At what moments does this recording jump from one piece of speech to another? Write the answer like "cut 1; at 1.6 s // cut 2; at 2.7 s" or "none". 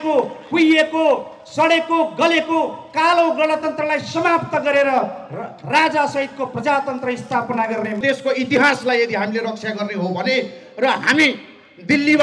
cut 1; at 8.0 s